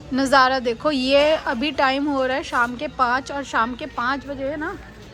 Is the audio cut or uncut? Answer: uncut